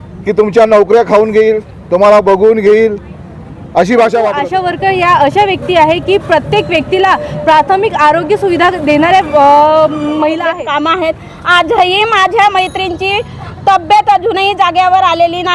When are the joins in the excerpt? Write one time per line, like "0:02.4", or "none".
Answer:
0:04.4
0:10.5

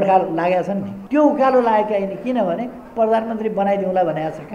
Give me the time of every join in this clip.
0:00.9

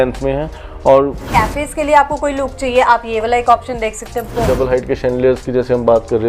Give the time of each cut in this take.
0:01.2
0:04.4

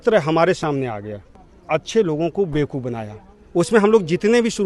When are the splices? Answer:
0:01.4

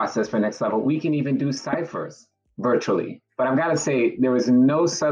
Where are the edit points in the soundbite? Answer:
0:03.2

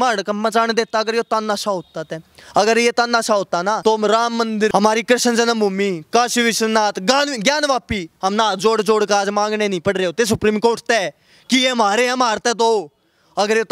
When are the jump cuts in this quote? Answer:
0:02.4
0:03.8
0:04.7

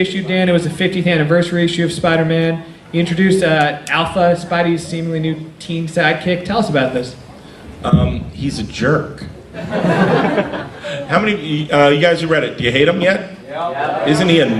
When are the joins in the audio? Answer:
none

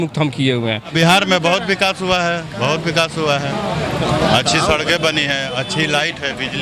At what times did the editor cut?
0:00.9

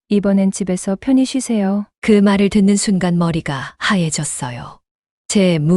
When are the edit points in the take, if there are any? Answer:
none

